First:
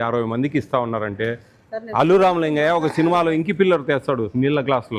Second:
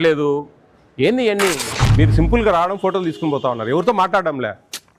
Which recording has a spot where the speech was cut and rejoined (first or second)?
second